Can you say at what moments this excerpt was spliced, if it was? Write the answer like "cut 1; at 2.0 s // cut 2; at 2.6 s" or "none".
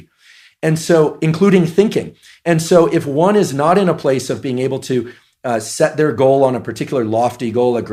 none